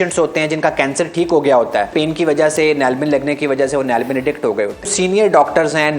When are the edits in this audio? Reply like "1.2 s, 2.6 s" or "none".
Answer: 1.9 s, 4.9 s